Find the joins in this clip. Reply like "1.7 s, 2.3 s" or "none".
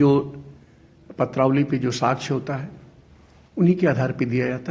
none